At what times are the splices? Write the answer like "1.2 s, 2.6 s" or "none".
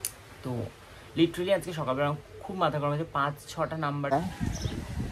4.1 s